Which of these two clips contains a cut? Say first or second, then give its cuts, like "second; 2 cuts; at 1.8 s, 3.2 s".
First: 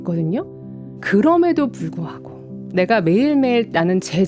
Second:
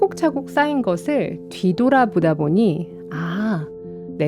first; 1 cut; at 1.0 s